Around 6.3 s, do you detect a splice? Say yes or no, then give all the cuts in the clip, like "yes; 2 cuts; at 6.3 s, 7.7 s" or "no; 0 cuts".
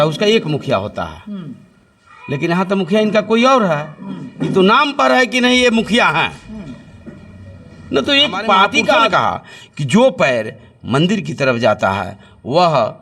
no; 1 cut; at 9.0 s